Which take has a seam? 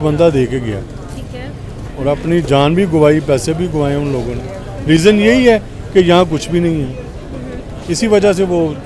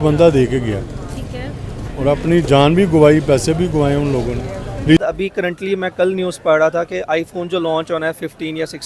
second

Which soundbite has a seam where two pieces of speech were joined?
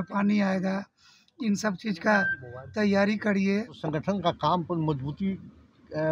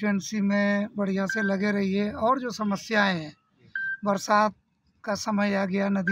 first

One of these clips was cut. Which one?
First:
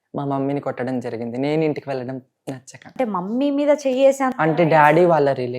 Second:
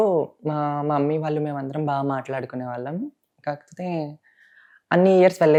first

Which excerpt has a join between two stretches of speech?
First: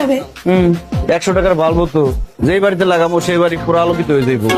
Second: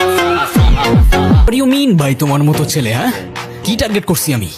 second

